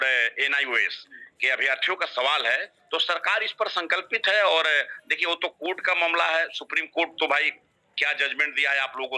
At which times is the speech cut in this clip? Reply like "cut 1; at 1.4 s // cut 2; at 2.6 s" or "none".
none

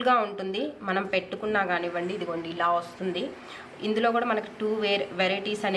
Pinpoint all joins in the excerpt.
none

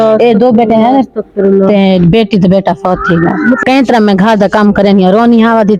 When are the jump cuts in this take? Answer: cut 1; at 3.6 s

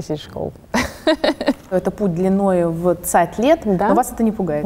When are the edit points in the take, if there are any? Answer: cut 1; at 1.7 s

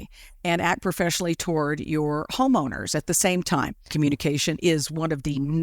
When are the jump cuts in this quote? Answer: cut 1; at 3.9 s

